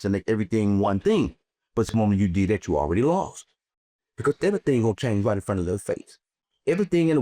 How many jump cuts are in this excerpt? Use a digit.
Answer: 0